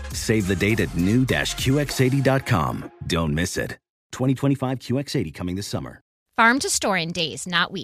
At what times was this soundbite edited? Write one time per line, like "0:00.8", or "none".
0:06.2